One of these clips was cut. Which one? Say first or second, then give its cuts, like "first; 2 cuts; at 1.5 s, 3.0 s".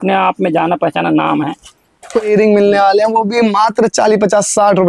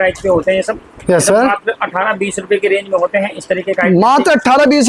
first; 1 cut; at 2.2 s